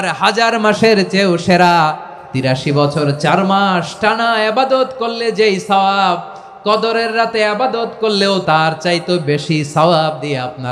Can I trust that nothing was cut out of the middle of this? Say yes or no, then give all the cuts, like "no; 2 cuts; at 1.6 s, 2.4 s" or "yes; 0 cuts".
no; 2 cuts; at 2.5 s, 8.4 s